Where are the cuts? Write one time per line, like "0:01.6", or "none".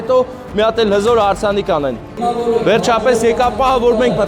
0:02.1